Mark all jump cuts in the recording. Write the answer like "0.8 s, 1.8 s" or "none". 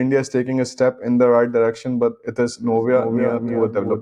none